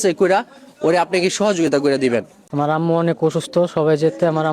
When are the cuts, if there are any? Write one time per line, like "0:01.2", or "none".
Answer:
0:02.4